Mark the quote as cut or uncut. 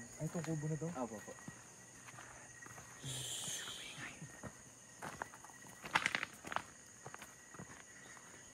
uncut